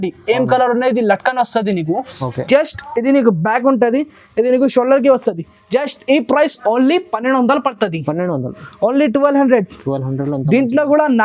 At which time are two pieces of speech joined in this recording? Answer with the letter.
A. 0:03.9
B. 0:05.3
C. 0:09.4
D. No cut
D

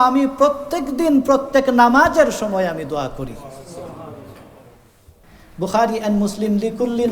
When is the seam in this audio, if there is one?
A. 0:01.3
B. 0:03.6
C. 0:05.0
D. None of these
C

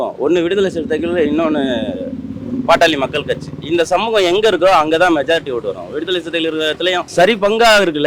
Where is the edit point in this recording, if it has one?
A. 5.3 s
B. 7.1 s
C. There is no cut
B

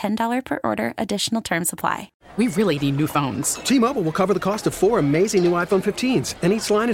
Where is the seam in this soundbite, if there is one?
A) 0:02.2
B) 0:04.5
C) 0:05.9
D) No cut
A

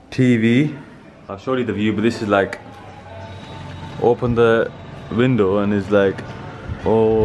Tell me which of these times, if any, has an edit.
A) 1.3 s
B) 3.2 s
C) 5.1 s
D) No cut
A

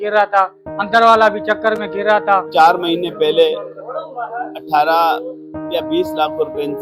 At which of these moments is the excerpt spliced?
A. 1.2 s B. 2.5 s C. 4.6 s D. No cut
B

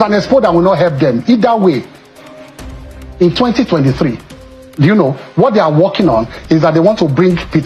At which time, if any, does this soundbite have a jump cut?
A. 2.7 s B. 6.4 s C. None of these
C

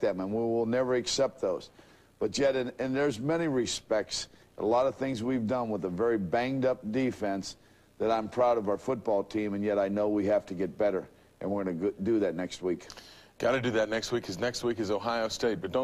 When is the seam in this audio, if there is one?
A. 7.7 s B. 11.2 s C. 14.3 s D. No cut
A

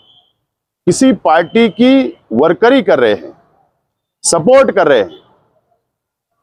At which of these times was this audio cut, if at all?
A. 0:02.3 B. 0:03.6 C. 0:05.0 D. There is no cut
D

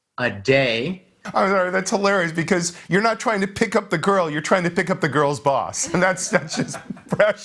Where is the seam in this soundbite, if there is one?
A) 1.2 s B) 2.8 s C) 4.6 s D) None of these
A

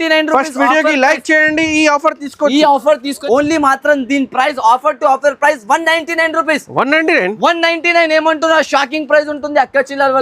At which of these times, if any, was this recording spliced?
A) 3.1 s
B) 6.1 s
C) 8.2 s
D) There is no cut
A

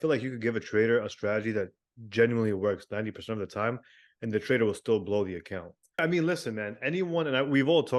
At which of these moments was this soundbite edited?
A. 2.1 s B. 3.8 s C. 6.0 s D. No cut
C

